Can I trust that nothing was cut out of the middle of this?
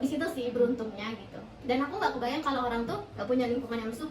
no; 1 cut; at 3.1 s

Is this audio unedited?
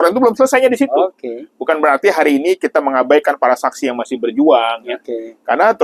yes; 0 cuts

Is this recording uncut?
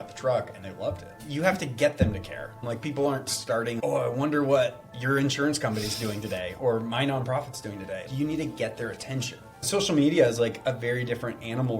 no; 5 cuts; at 1.2 s, 2.6 s, 3.8 s, 8.1 s, 9.6 s

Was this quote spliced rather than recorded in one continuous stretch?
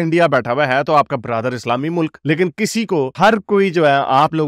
no; 0 cuts

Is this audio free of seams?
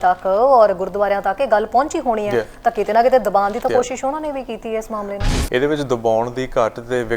no; 1 cut; at 5.2 s

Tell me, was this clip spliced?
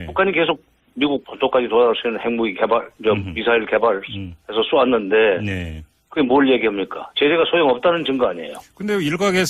yes; 1 cut; at 1.3 s

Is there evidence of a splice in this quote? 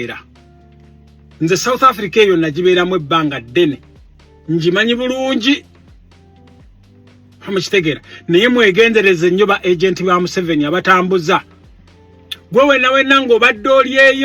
yes; 2 cuts; at 5.9 s, 7.4 s

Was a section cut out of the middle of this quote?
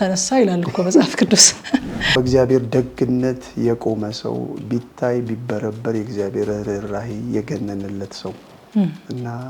yes; 1 cut; at 2.1 s

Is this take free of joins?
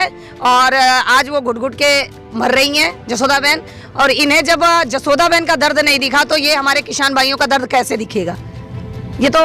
yes; 0 cuts

